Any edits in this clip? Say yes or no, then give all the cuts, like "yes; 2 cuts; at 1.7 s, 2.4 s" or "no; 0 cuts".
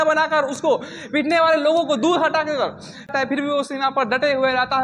yes; 1 cut; at 3.1 s